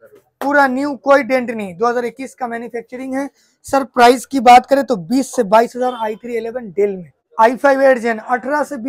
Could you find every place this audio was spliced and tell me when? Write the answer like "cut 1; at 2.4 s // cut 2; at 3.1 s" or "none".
cut 1; at 7.1 s